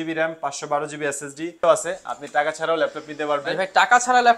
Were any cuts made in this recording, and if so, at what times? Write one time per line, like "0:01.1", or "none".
0:01.5

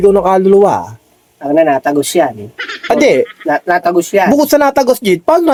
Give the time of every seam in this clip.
none

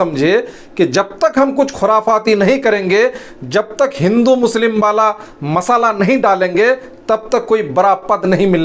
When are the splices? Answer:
none

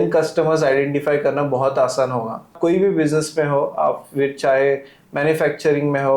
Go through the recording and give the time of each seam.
0:02.5

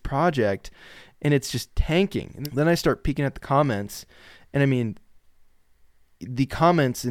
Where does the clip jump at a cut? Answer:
0:02.3

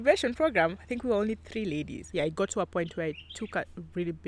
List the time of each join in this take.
0:02.0

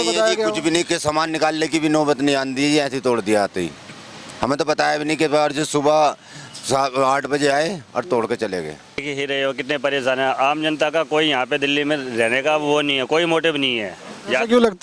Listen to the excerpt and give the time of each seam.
0:09.0

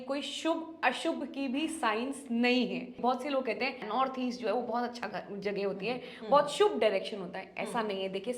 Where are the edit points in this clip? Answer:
0:03.0
0:03.8

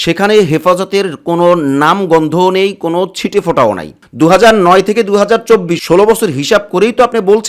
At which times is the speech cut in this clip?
0:04.0

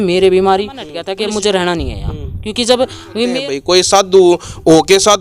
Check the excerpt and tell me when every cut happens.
0:01.0
0:03.2

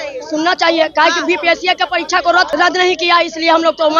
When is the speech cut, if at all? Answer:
0:02.5

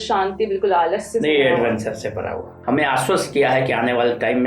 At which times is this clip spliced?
0:02.5

